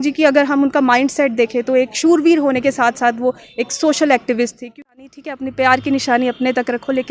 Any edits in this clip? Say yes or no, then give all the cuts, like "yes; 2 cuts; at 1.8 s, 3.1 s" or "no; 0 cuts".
yes; 1 cut; at 4.8 s